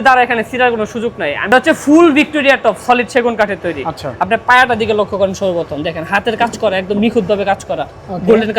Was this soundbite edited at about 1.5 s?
yes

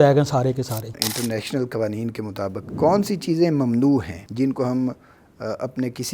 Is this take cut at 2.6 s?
yes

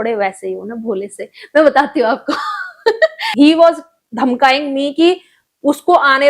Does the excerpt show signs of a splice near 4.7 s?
no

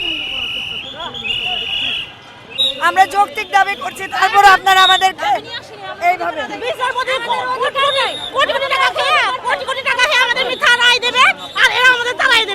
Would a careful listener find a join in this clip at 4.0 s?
no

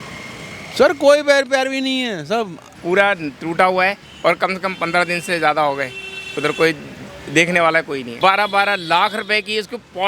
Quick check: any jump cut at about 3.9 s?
no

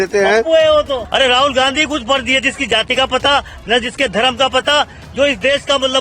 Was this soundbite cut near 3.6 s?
no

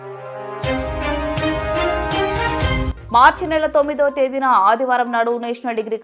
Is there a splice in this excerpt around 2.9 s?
no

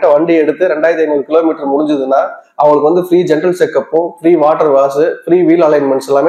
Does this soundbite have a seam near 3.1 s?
no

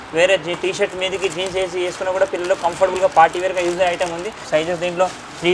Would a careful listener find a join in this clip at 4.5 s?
yes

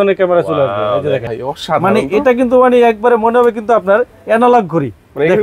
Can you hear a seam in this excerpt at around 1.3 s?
yes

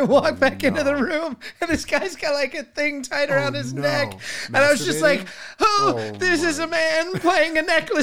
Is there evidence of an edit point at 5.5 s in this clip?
yes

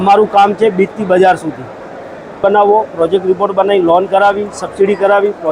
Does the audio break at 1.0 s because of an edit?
no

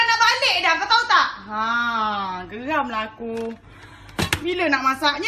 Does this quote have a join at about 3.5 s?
no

